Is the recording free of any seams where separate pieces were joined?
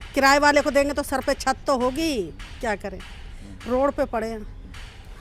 yes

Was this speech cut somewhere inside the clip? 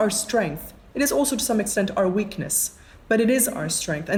no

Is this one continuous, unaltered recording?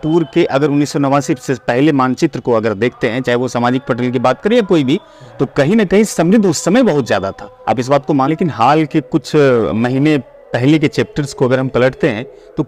no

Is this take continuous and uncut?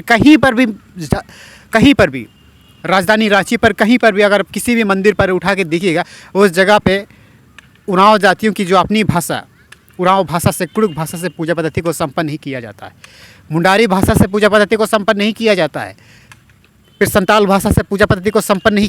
yes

